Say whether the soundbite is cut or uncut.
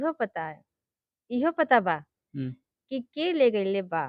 uncut